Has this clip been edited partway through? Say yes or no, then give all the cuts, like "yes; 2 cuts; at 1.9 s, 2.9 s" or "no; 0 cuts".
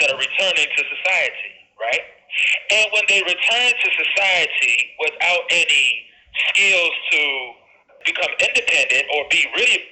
yes; 1 cut; at 7.9 s